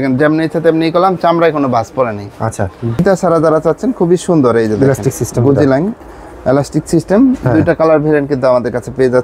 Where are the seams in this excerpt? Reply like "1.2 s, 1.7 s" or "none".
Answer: 3.0 s